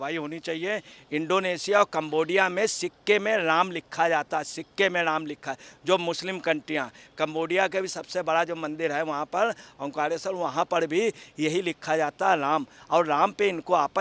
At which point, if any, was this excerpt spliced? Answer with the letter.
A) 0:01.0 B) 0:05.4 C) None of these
A